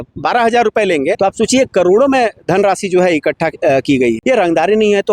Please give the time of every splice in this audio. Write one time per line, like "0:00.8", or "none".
0:04.2